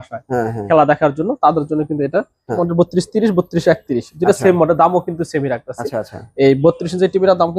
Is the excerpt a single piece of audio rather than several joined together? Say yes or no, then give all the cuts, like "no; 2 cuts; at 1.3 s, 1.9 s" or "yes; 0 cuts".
no; 1 cut; at 2.7 s